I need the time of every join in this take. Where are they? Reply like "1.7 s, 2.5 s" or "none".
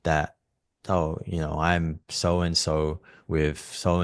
none

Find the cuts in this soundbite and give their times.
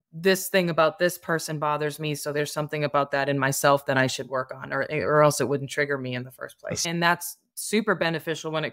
6.8 s

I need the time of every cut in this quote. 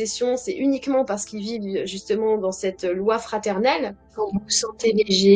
4.0 s

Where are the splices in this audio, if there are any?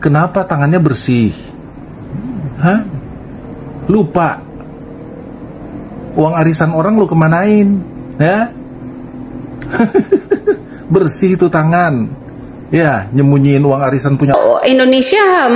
14.3 s

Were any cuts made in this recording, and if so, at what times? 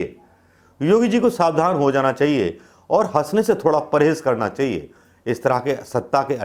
none

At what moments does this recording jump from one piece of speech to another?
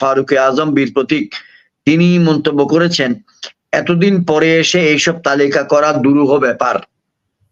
none

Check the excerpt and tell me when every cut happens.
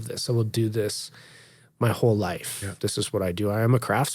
2.7 s

